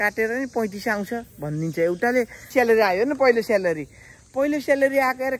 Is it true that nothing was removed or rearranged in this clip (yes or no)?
no